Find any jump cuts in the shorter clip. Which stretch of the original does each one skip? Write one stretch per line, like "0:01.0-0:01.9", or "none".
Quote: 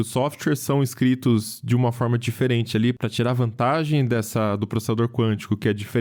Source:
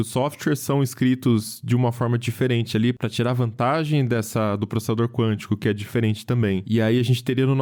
none

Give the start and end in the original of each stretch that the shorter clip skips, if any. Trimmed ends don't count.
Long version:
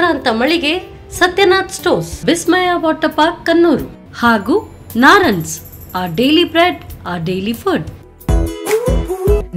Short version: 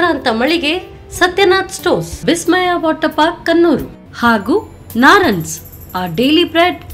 none

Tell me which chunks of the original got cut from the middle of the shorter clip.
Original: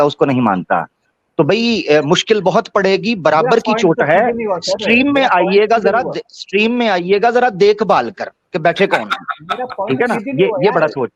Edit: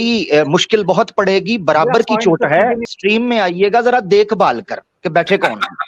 0:04.4-0:06.4

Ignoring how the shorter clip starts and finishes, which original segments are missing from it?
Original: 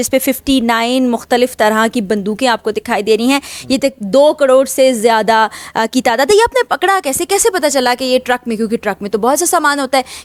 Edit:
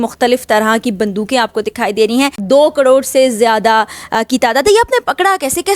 0:03.5-0:04.0

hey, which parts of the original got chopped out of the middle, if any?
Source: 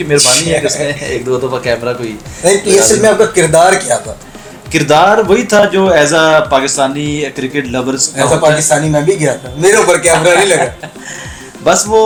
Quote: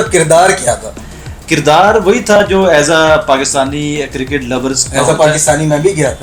none

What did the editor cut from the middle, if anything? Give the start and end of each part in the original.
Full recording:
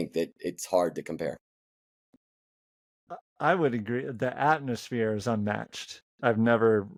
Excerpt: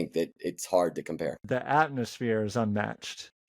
0:01.4-0:04.1

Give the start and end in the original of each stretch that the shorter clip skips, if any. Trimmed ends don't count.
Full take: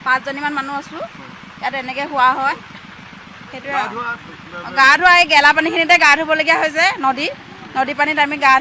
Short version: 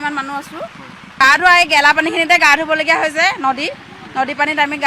0:01.6-0:04.8

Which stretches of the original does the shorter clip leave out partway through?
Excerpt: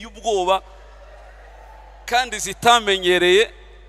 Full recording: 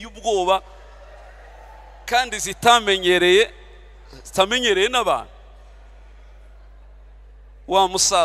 none

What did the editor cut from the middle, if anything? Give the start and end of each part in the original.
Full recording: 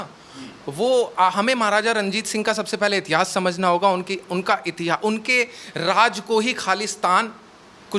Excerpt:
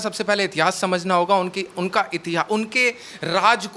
none

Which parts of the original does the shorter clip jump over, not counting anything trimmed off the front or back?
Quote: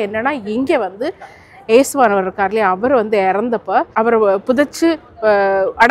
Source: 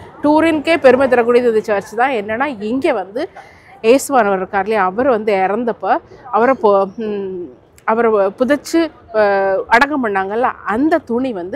0:06.0-0:07.8

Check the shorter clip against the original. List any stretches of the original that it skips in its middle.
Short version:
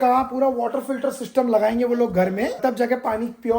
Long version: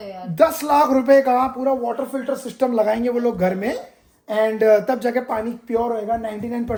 0:03.8-0:04.8

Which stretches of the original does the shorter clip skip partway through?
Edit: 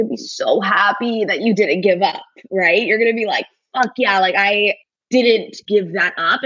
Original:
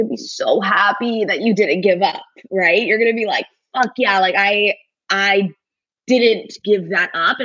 0:04.9-0:05.9

